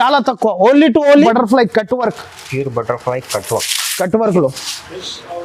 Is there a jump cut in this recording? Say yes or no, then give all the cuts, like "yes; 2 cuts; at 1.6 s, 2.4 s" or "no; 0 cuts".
yes; 1 cut; at 1.2 s